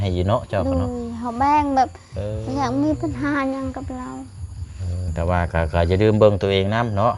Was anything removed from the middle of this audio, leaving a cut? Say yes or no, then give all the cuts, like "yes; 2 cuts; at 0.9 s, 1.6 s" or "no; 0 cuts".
yes; 1 cut; at 5.1 s